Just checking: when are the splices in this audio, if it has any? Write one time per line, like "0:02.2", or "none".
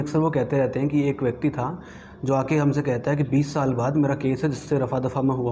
none

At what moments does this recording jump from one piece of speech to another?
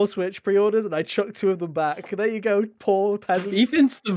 none

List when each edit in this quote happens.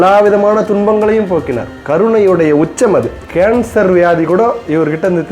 0:03.2

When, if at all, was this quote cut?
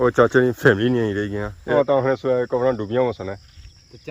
0:01.6

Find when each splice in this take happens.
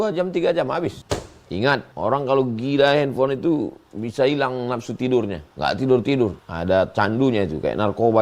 0:01.0
0:01.9
0:05.4
0:06.5

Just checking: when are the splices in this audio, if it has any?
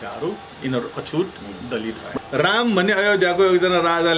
0:02.1

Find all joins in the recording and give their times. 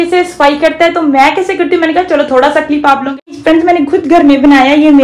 0:03.2

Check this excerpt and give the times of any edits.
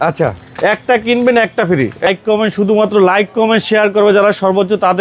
0:02.1

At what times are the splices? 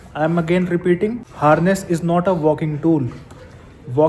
0:01.2

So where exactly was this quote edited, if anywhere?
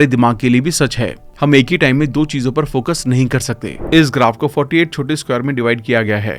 0:03.7

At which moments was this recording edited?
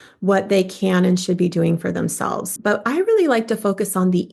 0:02.5

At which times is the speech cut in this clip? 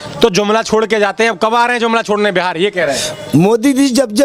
none

